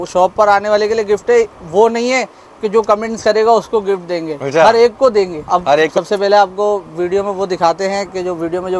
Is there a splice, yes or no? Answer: yes